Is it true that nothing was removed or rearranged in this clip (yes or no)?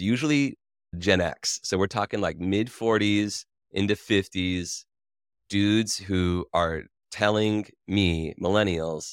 no